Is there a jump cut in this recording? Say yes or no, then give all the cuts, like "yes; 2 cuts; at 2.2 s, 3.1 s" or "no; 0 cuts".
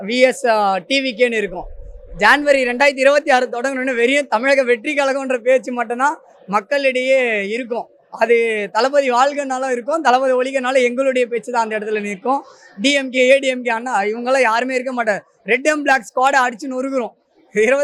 no; 0 cuts